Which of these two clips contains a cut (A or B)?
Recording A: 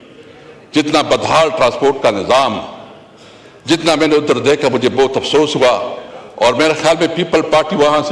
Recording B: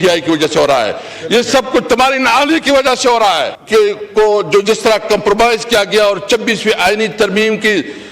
B